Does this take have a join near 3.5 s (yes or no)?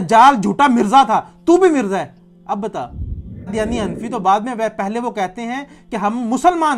yes